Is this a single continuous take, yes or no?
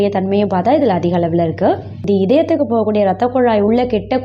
no